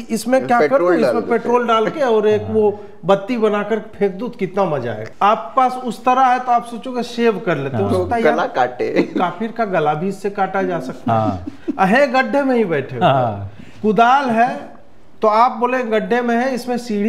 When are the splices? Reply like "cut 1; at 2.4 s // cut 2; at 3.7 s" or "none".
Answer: cut 1; at 5.0 s

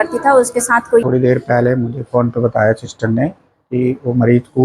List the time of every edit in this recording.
cut 1; at 1.1 s

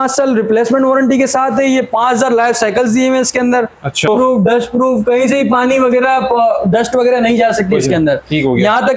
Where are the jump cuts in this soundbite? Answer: cut 1; at 4.1 s

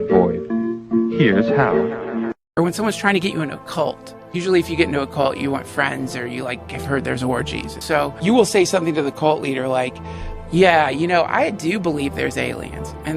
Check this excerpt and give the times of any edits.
cut 1; at 2.4 s

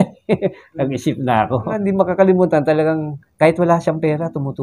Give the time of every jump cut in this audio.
cut 1; at 1.7 s

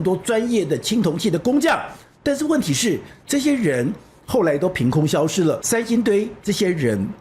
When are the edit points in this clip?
cut 1; at 5.6 s

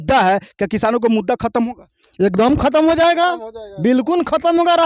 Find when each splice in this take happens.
none

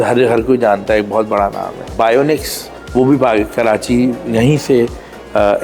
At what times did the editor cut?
cut 1; at 1.9 s // cut 2; at 2.8 s

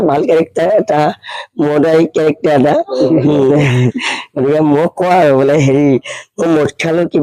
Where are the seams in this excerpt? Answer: none

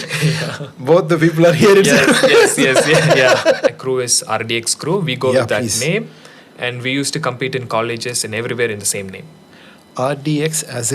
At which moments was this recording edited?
cut 1; at 3.7 s

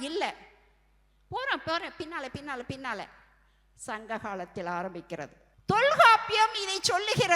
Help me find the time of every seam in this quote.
cut 1; at 5.4 s

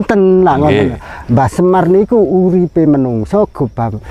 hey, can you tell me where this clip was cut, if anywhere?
none

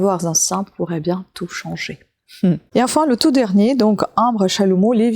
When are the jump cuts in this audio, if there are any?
cut 1; at 2.6 s

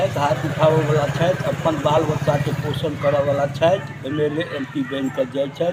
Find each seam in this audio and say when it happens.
none

